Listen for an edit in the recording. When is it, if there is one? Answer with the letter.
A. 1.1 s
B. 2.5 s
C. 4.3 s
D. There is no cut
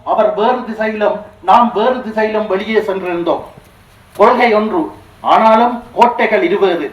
D